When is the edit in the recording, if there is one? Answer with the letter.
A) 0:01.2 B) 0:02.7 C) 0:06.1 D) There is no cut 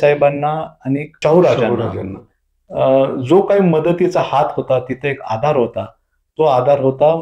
A